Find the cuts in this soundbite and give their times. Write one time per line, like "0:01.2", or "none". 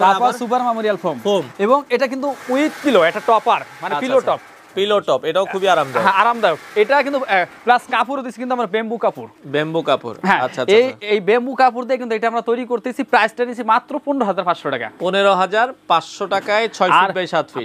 none

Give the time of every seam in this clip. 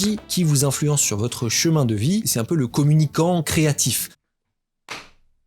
0:02.3

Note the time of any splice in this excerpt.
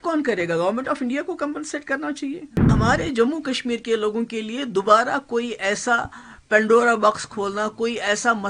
0:02.7

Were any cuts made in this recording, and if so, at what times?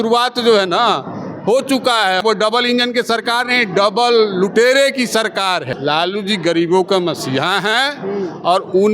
0:02.2
0:05.7

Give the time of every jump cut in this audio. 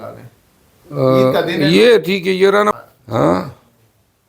0:02.6

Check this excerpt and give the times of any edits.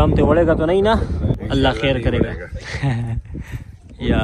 0:01.4

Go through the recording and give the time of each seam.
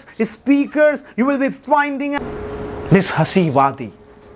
0:02.2

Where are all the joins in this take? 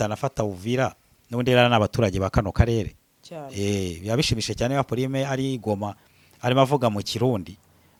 none

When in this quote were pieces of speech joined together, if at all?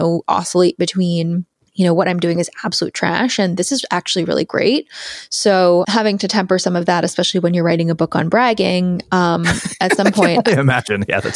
0:01.6
0:05.9

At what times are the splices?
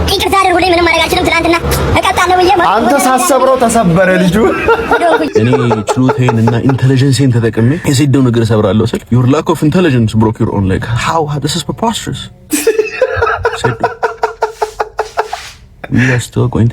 0:05.3
0:07.8
0:09.0

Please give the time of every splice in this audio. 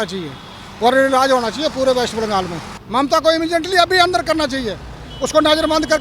0:02.8

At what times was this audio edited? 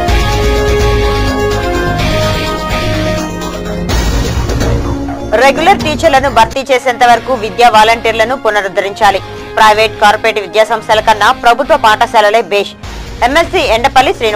0:04.1

